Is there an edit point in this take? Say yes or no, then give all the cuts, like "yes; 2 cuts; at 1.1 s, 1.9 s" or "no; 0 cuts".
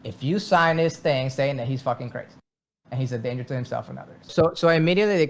yes; 1 cut; at 4.3 s